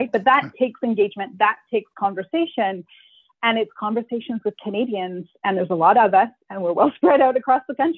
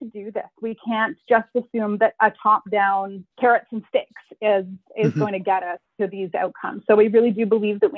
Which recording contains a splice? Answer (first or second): second